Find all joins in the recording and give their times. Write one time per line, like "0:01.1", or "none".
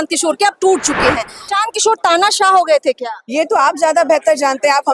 0:01.5

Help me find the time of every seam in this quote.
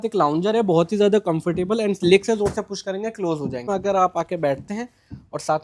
0:03.6

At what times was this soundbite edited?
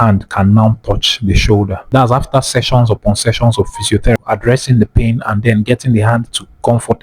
0:01.8
0:04.2

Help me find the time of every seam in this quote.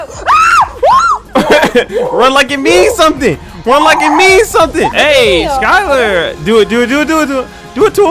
0:04.9

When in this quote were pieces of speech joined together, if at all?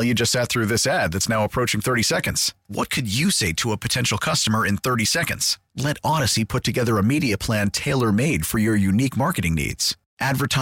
none

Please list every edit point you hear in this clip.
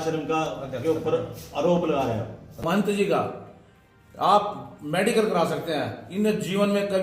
0:02.6

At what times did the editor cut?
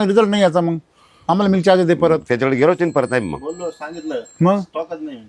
none

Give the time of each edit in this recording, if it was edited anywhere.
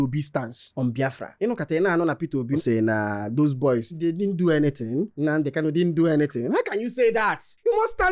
0:02.6
0:04.0

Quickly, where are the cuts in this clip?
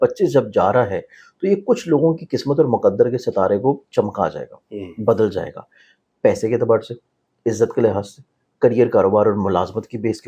none

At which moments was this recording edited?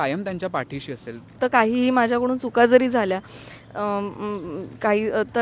0:01.4

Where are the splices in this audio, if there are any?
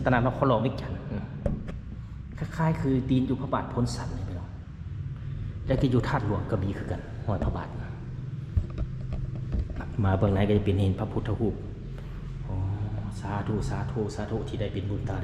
none

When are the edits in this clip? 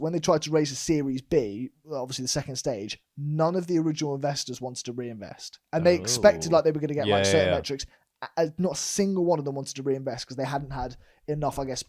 none

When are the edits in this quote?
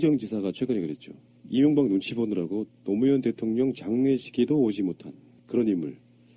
none

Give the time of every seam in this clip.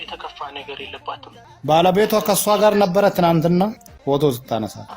0:01.4

